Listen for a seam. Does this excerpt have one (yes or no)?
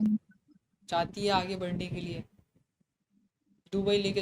yes